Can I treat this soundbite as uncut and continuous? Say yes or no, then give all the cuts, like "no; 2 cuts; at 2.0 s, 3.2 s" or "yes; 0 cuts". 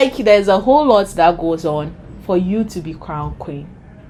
yes; 0 cuts